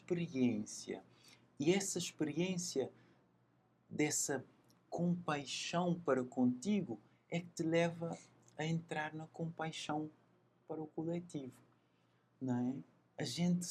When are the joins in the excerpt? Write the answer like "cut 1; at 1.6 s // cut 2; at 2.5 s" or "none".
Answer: none

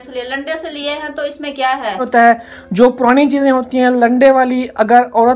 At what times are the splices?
cut 1; at 2.1 s

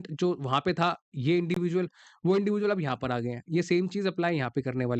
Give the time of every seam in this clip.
none

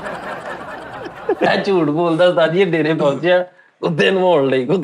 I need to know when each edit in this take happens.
cut 1; at 1.4 s

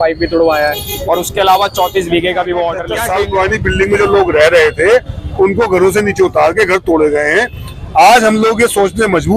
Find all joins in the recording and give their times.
cut 1; at 2.9 s

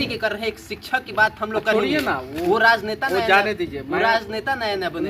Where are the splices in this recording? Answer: none

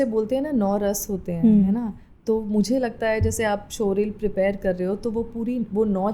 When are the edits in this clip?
none

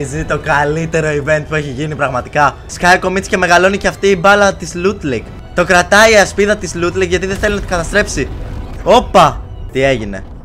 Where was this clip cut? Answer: cut 1; at 2.7 s // cut 2; at 5.4 s // cut 3; at 9.5 s

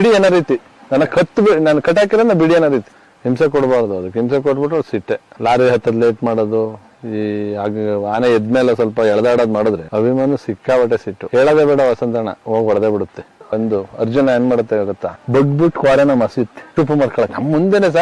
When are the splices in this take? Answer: cut 1; at 2.9 s // cut 2; at 13.3 s

